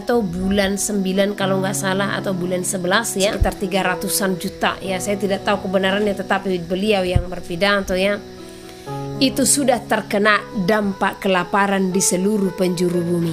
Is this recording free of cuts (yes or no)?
no